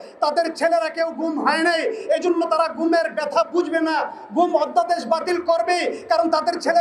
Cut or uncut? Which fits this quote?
uncut